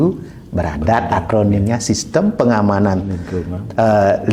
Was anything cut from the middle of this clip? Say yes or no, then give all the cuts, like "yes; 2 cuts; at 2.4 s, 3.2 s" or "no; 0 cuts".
no; 0 cuts